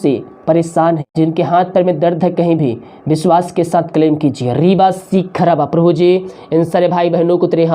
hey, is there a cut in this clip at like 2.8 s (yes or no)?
no